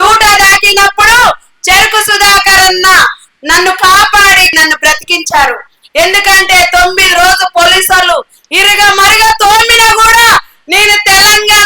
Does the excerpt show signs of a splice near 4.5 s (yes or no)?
yes